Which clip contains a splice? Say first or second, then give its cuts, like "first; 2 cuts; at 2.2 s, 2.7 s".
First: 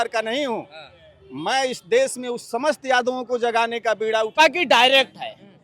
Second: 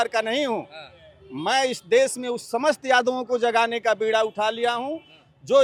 first; 1 cut; at 4.3 s